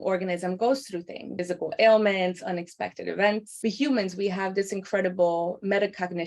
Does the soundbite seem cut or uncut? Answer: cut